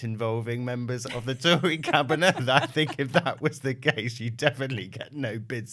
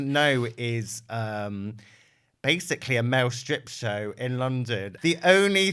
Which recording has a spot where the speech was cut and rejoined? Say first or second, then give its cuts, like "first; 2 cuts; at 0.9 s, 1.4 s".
second; 1 cut; at 4.8 s